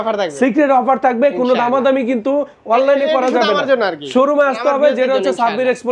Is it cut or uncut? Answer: uncut